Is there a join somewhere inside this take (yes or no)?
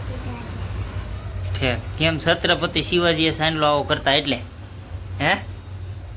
no